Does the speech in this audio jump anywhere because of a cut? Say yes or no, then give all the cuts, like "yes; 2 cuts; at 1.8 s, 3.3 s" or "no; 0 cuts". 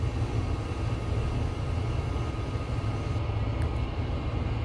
no; 0 cuts